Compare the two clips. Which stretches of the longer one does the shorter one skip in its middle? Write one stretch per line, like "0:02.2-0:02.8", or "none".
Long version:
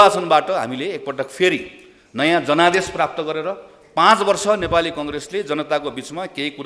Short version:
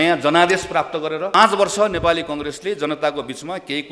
0:03.6-0:04.0